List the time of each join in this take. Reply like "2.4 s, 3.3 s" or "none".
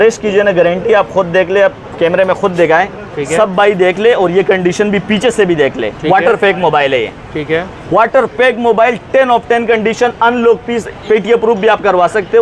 none